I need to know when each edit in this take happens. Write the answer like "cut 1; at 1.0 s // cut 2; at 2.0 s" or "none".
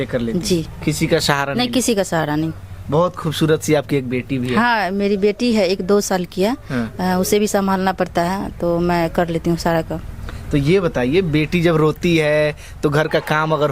none